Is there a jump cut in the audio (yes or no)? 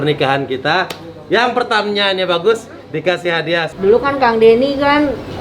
yes